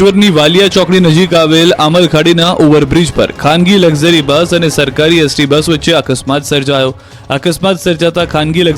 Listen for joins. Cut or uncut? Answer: uncut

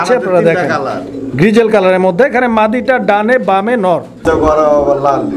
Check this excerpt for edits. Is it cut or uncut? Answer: cut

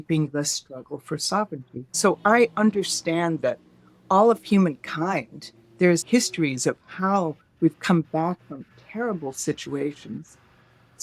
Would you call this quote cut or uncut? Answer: cut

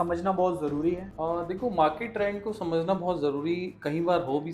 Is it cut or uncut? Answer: cut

